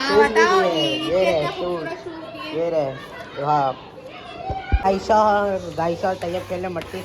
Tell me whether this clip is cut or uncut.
cut